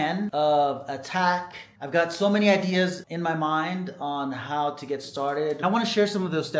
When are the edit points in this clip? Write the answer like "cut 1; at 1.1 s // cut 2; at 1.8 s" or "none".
cut 1; at 5.6 s